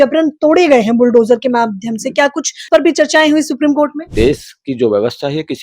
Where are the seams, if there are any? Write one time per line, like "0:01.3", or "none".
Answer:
0:02.7
0:04.0